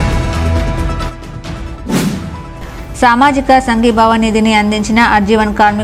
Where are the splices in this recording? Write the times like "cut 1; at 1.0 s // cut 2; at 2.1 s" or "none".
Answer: none